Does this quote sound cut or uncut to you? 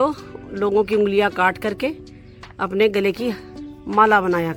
uncut